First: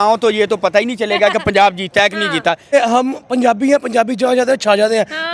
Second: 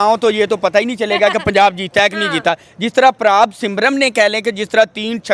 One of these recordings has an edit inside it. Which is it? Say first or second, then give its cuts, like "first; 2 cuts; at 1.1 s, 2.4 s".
first; 1 cut; at 2.7 s